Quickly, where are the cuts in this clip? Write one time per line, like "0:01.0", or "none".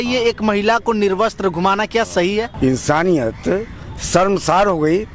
0:02.5